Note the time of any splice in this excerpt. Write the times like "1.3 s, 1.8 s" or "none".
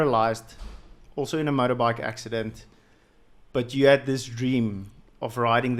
none